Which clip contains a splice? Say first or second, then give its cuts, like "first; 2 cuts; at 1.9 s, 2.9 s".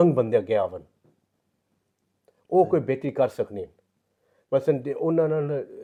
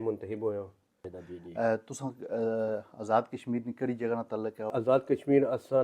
second; 2 cuts; at 1.1 s, 4.7 s